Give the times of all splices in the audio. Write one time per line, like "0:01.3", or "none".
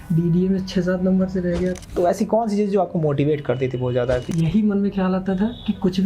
0:01.8
0:04.3